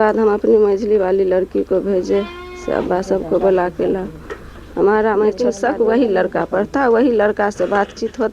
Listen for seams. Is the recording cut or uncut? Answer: cut